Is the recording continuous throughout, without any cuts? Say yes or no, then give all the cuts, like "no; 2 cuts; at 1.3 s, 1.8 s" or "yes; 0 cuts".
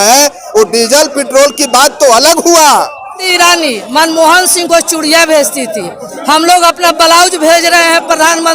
no; 1 cut; at 3.2 s